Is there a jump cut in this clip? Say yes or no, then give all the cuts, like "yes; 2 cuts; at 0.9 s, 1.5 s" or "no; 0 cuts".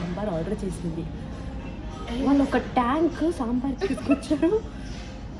no; 0 cuts